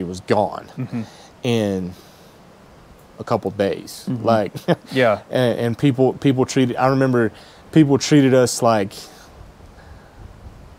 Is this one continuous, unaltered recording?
yes; 0 cuts

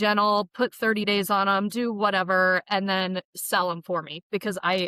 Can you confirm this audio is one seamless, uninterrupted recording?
yes; 0 cuts

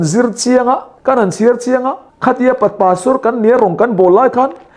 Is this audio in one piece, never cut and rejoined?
no; 2 cuts; at 0.9 s, 2.0 s

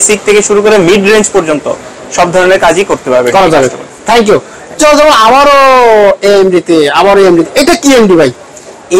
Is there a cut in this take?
no; 0 cuts

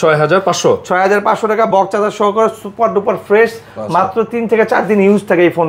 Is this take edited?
no; 0 cuts

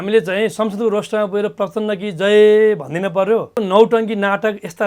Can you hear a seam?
yes; 1 cut; at 3.5 s

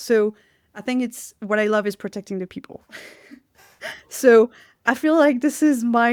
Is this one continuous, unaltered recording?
yes; 0 cuts

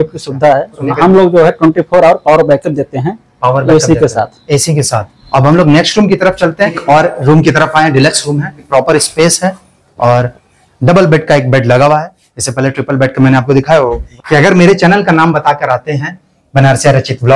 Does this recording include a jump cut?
yes; 5 cuts; at 0.9 s, 5.1 s, 6.8 s, 8.6 s, 14.1 s

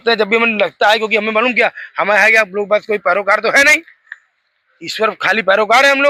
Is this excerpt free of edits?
yes; 0 cuts

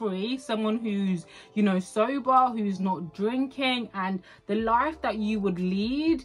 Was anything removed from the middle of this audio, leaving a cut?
no; 0 cuts

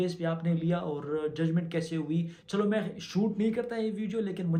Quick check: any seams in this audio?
no; 0 cuts

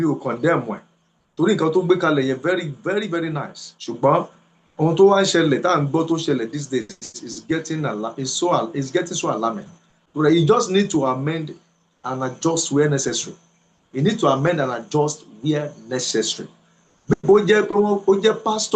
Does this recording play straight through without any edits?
yes; 0 cuts

